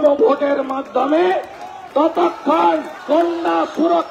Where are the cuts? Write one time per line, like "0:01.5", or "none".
0:02.9